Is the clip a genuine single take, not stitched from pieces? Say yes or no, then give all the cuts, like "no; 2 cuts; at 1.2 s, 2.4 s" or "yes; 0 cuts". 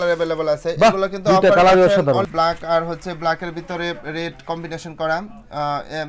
no; 1 cut; at 2.3 s